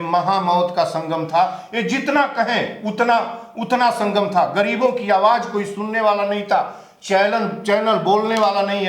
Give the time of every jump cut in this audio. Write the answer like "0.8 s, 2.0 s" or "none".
none